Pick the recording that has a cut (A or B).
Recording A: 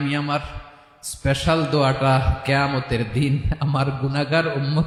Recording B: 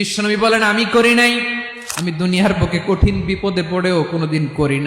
B